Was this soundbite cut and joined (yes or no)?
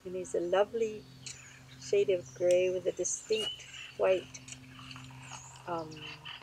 no